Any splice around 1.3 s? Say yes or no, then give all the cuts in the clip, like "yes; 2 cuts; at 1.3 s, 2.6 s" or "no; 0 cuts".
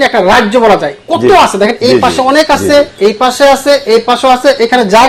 no; 0 cuts